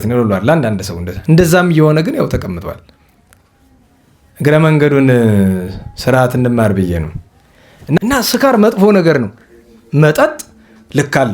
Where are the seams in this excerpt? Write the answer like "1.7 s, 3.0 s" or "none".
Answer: 8.0 s